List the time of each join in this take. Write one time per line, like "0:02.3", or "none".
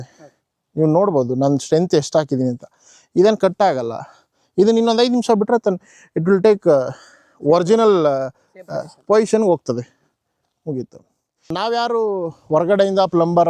0:11.5